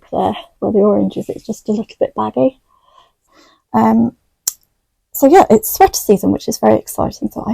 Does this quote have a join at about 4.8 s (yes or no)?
no